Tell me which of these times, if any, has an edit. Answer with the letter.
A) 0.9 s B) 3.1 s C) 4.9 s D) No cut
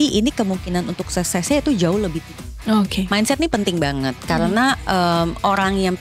B